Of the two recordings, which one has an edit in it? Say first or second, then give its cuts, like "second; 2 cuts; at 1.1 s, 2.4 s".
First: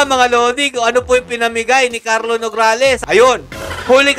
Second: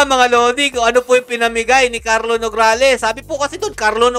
first; 1 cut; at 3.1 s